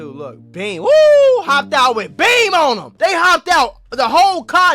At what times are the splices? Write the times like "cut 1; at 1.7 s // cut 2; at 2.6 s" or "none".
cut 1; at 2.9 s